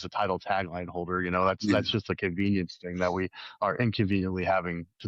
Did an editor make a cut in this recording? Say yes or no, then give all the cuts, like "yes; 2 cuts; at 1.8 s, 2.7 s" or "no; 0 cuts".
no; 0 cuts